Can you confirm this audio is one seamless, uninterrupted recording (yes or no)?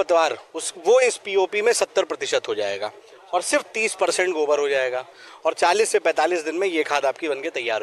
yes